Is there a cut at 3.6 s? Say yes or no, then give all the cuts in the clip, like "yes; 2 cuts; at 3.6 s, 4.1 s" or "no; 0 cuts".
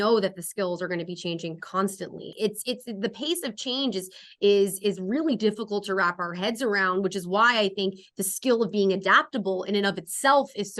no; 1 cut; at 2.2 s